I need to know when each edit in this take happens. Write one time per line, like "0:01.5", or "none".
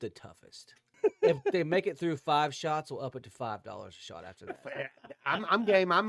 0:01.0